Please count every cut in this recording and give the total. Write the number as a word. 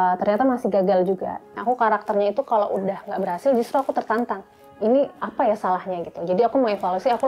two